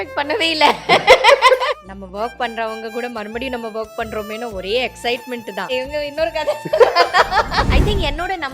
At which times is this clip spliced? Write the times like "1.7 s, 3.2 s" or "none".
1.8 s, 5.7 s, 7.7 s